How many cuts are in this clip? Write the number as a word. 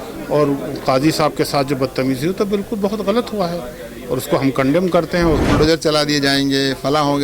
one